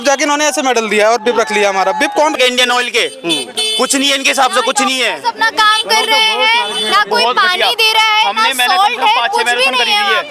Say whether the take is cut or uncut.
cut